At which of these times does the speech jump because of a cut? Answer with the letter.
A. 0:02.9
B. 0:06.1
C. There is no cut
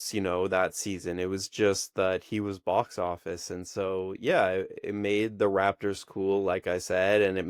C